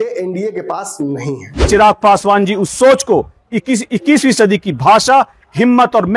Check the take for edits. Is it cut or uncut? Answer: cut